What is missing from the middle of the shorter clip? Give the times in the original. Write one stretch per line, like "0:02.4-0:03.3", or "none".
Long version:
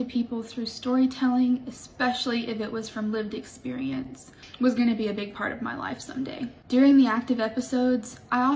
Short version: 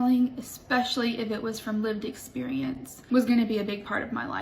0:04.2-0:04.4